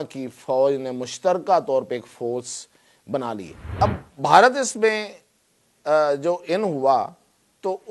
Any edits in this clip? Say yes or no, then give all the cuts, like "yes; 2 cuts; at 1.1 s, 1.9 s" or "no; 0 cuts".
yes; 1 cut; at 3.6 s